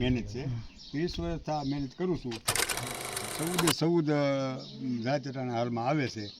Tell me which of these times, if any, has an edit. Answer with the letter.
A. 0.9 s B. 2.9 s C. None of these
B